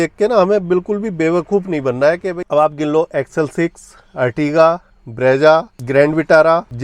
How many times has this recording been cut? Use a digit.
1